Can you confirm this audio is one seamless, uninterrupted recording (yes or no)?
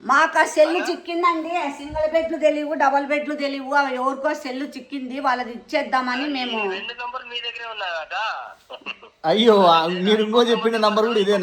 yes